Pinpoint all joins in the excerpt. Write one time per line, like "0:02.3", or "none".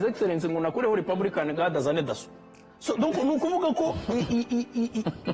none